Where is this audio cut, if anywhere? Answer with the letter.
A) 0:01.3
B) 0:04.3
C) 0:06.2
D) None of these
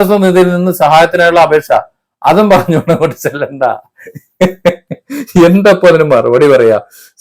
D